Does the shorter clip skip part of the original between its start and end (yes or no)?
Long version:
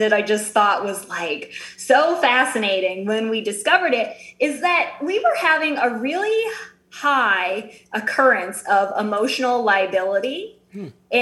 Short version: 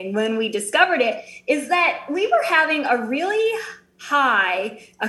no